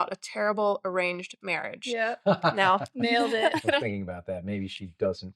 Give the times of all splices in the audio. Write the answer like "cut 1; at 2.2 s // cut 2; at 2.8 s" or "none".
cut 1; at 3.8 s